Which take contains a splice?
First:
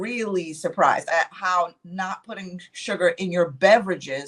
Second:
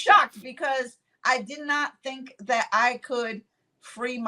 first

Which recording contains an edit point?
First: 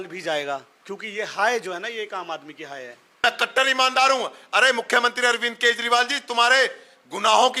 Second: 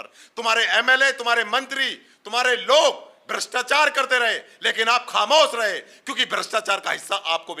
first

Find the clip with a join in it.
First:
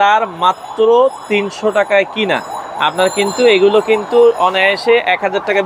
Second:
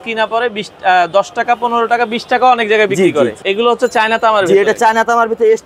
second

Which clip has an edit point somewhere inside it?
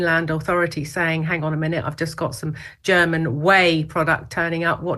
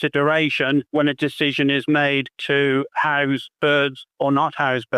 second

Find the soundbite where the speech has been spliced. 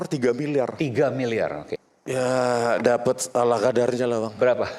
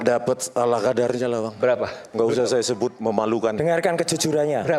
first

